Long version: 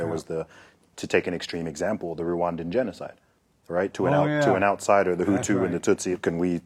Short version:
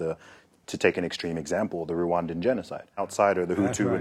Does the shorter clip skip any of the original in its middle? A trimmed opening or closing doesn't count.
yes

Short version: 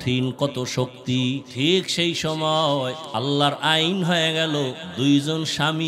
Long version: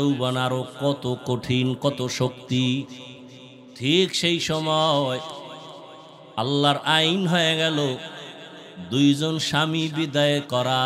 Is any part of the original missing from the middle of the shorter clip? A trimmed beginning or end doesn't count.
yes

